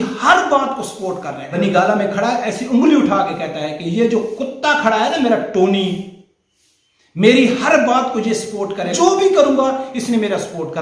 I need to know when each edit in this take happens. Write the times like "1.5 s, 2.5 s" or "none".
1.4 s, 8.9 s